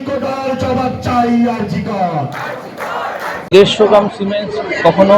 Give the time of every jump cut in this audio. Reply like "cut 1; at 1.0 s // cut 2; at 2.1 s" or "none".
cut 1; at 3.5 s